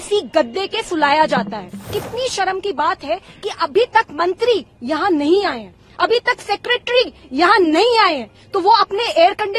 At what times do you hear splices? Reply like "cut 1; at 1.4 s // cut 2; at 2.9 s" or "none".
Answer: cut 1; at 2.0 s